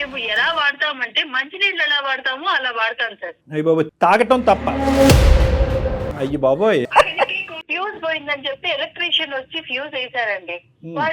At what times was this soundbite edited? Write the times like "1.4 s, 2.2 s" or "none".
6.1 s, 7.5 s